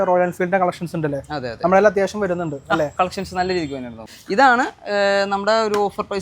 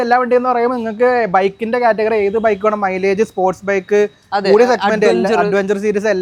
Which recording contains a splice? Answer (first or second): first